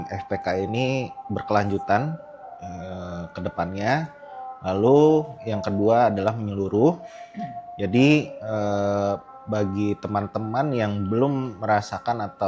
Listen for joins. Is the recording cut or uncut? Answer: uncut